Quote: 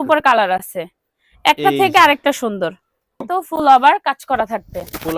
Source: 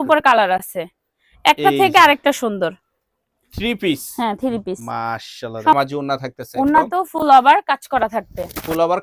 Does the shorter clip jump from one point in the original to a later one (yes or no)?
yes